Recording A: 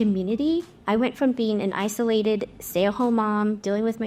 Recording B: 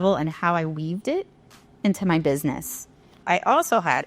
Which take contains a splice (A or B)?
B